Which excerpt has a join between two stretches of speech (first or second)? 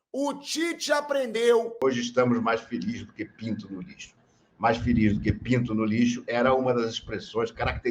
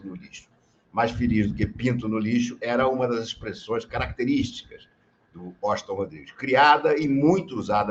first